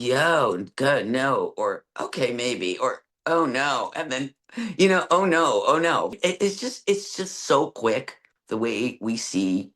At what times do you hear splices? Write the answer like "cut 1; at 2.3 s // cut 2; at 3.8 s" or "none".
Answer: cut 1; at 6.1 s